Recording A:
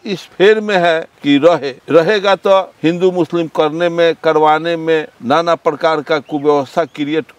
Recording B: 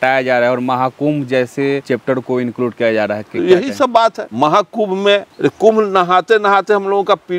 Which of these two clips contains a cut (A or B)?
B